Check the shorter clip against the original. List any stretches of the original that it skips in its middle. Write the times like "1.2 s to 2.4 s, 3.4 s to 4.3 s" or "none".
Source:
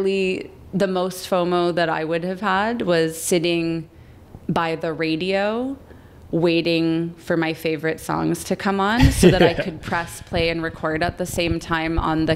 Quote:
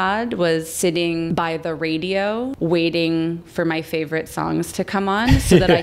3.8 s to 4.5 s, 5.7 s to 6.2 s